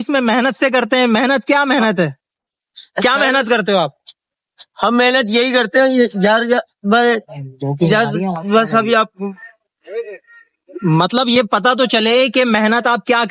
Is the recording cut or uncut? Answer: uncut